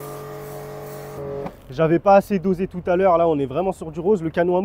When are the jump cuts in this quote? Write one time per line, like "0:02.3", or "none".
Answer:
0:01.2